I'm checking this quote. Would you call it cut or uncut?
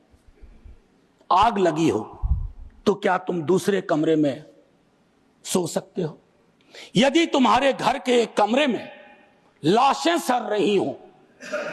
uncut